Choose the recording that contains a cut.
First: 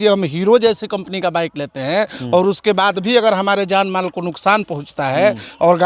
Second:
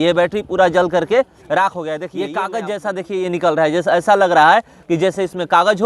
second; 1 cut; at 2.1 s

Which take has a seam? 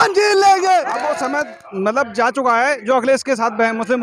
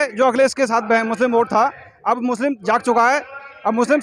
first; 1 cut; at 1.0 s

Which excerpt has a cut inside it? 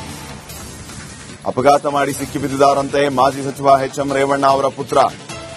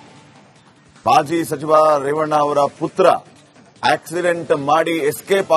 first; 1 cut; at 0.9 s

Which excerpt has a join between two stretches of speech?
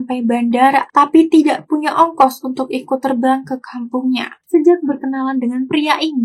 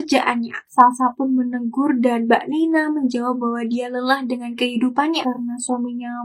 first; 1 cut; at 4.3 s

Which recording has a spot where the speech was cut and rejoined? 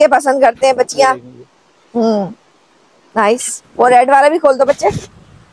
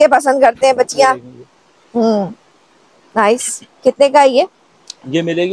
first; 1 cut; at 3.6 s

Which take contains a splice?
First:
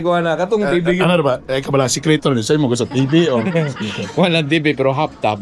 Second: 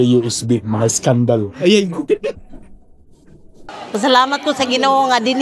second; 1 cut; at 3.8 s

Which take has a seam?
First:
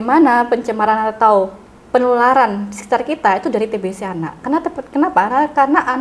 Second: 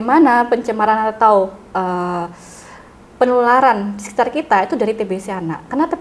first; 1 cut; at 1.6 s

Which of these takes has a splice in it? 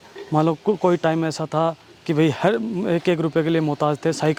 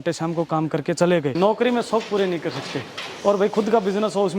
second; 1 cut; at 1.4 s

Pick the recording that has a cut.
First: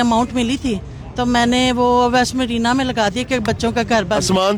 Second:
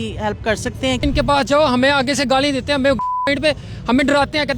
second; 1 cut; at 1.0 s

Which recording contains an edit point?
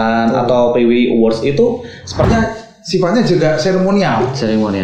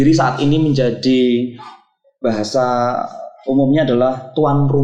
first; 1 cut; at 2.3 s

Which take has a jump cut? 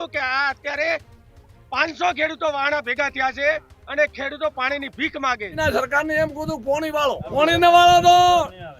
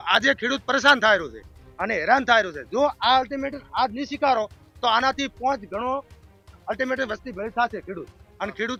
first; 2 cuts; at 5.6 s, 7.2 s

